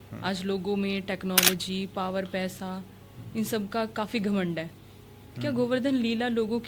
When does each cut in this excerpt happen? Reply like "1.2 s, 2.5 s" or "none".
none